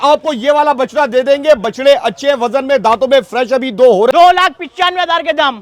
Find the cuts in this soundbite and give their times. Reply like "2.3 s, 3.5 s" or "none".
4.1 s